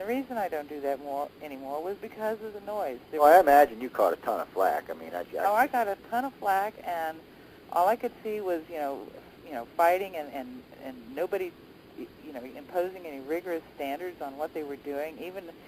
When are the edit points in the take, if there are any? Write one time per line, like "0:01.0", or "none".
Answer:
0:11.7

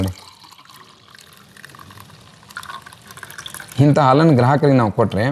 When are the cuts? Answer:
none

